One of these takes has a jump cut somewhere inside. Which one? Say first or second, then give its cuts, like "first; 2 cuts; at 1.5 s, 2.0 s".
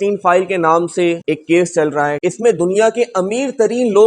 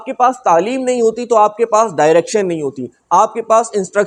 first; 2 cuts; at 1.2 s, 2.2 s